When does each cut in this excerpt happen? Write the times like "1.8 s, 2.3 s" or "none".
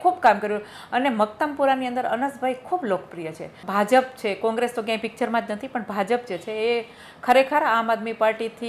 3.6 s